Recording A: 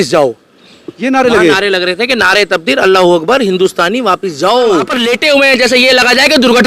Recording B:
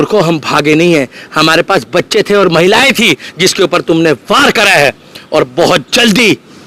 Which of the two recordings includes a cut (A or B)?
A